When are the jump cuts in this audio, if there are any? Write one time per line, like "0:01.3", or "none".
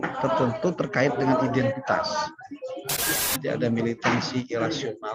0:03.1